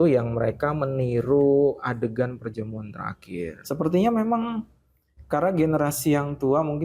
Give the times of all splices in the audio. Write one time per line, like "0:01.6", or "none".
0:03.6